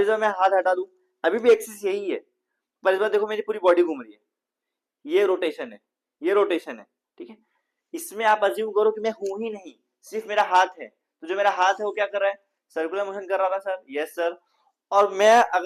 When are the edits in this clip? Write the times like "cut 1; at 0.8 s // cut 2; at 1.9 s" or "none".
none

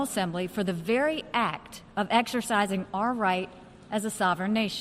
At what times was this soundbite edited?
none

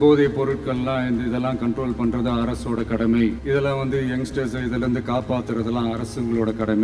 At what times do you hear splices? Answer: cut 1; at 3.4 s

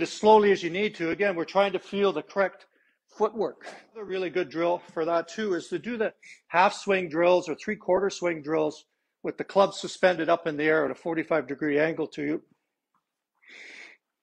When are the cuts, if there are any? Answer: cut 1; at 4.2 s

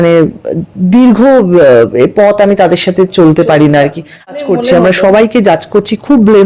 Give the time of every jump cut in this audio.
cut 1; at 4.3 s

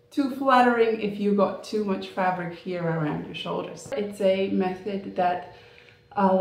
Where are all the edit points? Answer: cut 1; at 3.9 s

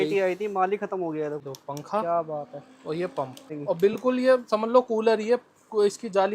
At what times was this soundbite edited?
cut 1; at 1.4 s // cut 2; at 3.5 s

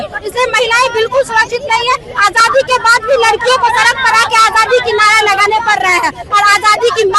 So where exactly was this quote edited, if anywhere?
none

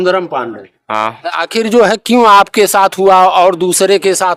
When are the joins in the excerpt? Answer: none

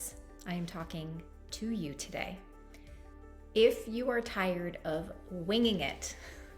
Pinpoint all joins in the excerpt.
none

